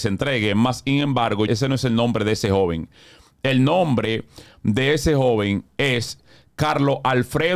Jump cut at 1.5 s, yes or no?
yes